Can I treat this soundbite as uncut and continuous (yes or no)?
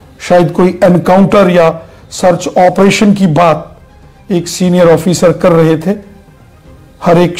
yes